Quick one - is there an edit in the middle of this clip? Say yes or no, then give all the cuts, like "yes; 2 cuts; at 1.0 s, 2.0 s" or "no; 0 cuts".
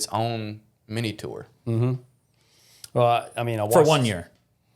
no; 0 cuts